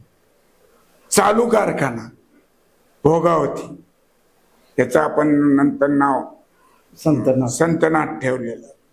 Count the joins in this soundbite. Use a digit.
0